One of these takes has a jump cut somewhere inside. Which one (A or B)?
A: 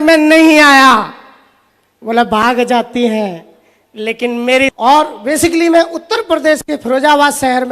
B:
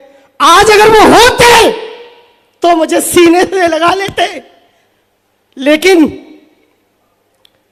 A